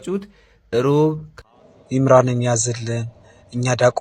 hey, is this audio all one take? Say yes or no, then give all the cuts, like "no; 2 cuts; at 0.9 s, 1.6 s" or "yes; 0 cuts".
no; 1 cut; at 1.3 s